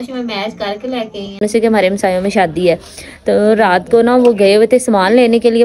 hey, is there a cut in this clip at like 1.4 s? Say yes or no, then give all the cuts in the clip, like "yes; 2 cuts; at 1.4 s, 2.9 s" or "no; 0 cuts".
yes; 1 cut; at 1.4 s